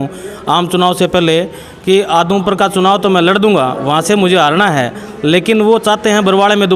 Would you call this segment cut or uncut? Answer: uncut